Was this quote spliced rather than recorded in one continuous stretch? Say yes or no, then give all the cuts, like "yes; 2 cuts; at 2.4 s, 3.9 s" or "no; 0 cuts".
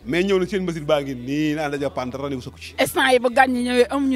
yes; 1 cut; at 2.7 s